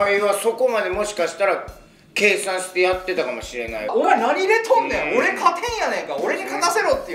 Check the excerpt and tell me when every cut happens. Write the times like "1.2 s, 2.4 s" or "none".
3.9 s